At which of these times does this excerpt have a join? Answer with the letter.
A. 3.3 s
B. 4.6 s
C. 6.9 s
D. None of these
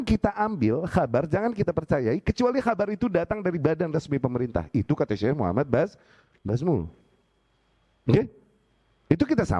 D